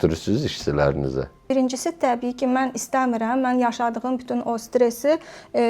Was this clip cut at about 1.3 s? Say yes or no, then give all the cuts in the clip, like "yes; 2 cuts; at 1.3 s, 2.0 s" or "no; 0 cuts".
yes; 1 cut; at 1.3 s